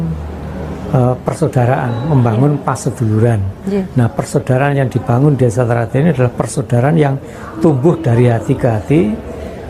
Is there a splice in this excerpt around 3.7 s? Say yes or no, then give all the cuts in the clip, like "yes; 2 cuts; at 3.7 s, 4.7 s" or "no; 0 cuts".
no; 0 cuts